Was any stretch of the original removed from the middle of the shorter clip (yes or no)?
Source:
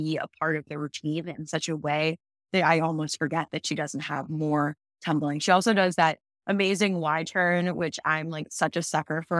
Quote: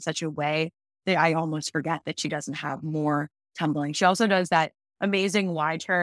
no